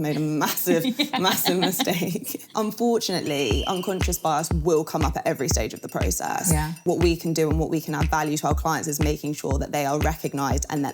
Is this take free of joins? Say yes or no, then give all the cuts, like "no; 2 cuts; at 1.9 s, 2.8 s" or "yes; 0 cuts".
no; 2 cuts; at 2.4 s, 6.8 s